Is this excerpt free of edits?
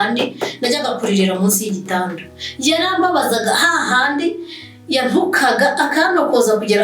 yes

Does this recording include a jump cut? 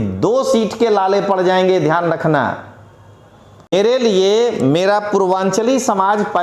yes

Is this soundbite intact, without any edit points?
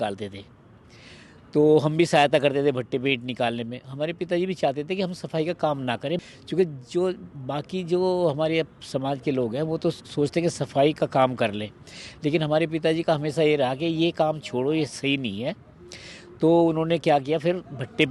yes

